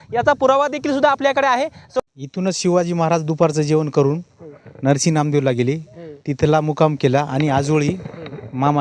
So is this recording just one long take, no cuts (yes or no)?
no